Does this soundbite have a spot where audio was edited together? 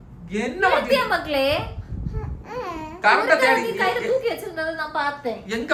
no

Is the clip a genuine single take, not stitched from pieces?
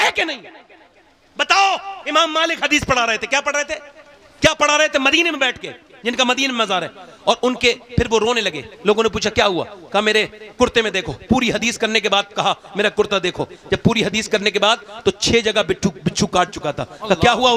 yes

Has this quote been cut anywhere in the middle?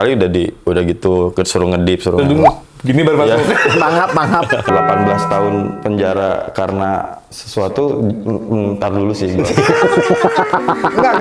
yes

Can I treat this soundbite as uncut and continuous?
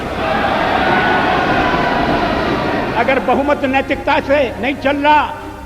no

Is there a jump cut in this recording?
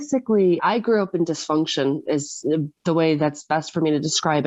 no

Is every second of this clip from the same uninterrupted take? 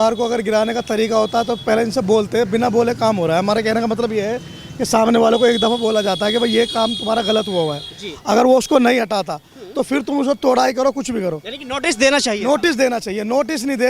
yes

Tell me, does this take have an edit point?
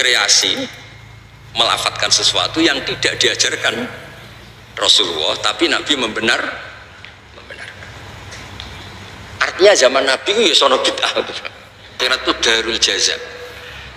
yes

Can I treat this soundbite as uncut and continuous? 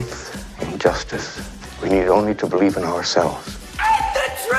yes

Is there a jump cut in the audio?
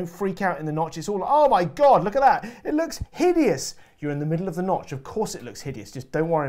no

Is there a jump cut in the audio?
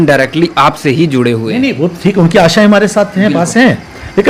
no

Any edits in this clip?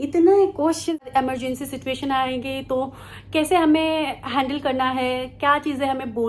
yes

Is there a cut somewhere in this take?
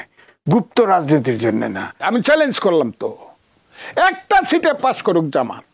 yes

